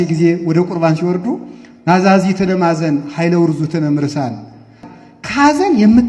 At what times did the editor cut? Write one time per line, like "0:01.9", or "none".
0:04.8